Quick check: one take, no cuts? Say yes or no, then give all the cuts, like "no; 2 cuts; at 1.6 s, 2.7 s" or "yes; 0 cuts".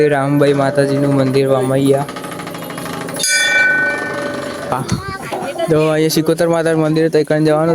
no; 1 cut; at 4.7 s